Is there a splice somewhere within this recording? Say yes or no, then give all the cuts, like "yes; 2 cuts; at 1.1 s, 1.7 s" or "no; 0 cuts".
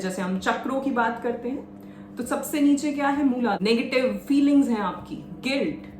yes; 1 cut; at 3.6 s